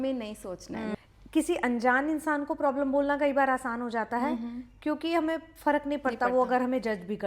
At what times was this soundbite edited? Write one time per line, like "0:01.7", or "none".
0:00.9